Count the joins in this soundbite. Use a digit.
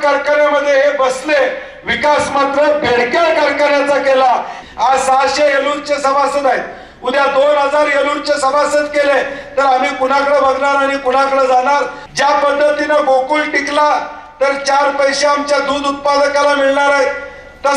2